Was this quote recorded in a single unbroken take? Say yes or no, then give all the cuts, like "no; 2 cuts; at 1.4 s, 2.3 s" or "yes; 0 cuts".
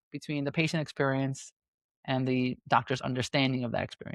yes; 0 cuts